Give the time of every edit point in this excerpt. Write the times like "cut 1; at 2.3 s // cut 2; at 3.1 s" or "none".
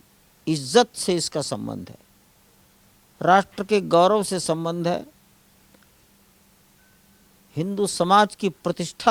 none